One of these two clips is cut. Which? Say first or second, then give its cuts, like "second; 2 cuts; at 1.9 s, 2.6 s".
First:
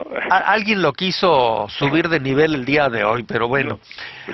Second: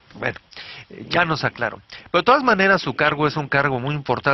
second; 1 cut; at 2.6 s